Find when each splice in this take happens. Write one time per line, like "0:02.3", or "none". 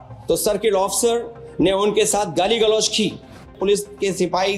0:03.5